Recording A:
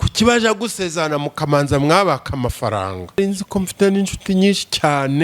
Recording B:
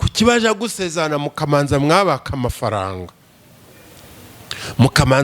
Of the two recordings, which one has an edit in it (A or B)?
A